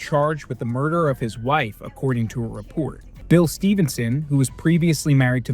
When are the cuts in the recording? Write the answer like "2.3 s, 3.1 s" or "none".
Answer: 3.1 s